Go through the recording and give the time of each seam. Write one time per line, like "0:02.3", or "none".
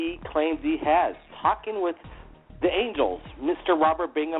none

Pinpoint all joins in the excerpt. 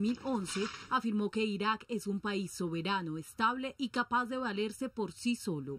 0:02.5

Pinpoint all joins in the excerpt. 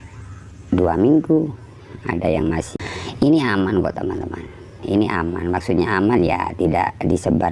0:02.7

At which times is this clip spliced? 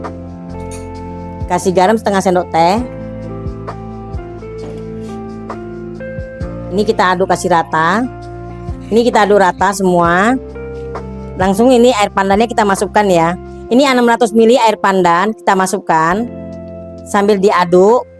0:01.1
0:03.0
0:06.7

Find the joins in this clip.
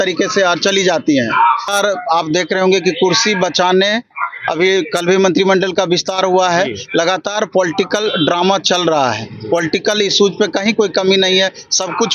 0:01.6

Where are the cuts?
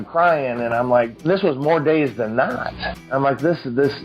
0:01.2
0:02.9

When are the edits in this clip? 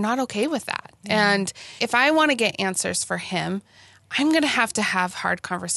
0:01.8

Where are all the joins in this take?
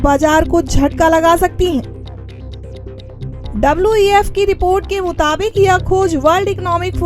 0:01.8
0:03.4

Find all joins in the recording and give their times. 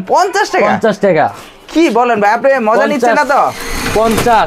none

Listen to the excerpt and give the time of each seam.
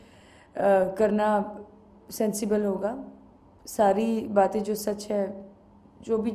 0:05.4

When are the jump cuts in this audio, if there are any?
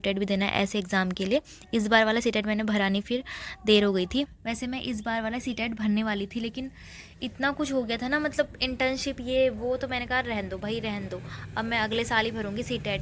none

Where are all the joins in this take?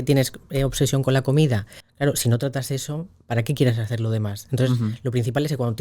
0:01.8

